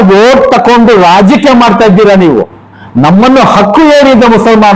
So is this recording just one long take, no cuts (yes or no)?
no